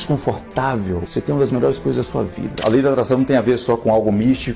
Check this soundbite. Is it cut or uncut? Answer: cut